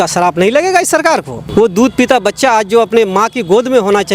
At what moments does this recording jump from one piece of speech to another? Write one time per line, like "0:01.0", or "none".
0:01.4